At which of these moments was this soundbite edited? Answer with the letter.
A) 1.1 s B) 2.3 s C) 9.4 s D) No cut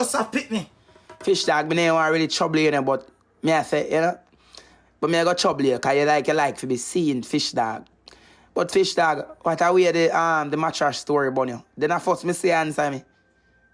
A